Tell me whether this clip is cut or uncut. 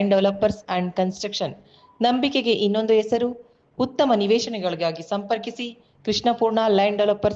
uncut